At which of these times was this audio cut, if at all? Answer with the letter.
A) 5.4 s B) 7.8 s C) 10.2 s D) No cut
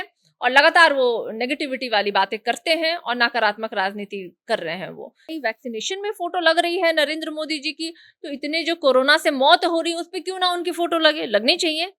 A